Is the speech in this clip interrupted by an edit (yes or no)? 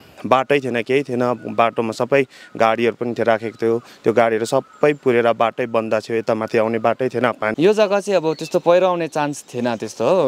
yes